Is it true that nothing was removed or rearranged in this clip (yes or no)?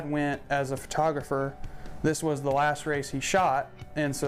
yes